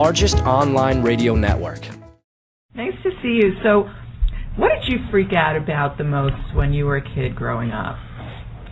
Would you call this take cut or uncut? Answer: uncut